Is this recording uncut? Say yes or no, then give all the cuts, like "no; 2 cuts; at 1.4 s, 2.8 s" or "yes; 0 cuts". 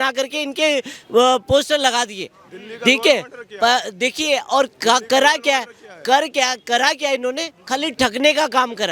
yes; 0 cuts